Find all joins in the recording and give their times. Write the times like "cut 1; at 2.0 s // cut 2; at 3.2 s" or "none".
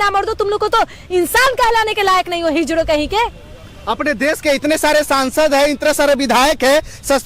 none